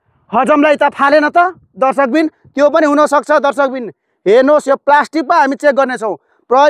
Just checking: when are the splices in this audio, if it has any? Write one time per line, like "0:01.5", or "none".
none